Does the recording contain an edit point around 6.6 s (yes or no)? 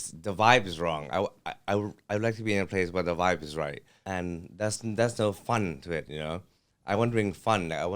no